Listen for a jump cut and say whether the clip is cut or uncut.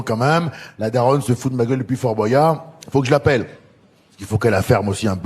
uncut